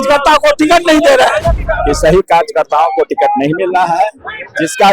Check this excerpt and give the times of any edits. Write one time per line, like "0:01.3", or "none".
0:01.5